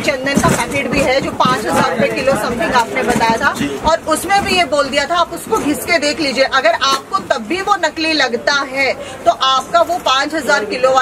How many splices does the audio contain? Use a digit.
0